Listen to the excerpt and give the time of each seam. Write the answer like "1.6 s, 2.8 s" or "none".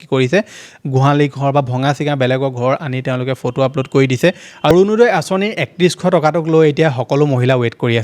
4.7 s